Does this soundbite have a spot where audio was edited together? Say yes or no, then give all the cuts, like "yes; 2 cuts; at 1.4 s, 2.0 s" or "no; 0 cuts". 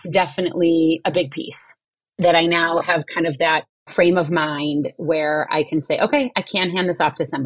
no; 0 cuts